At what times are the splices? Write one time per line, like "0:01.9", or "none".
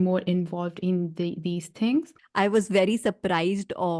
0:02.2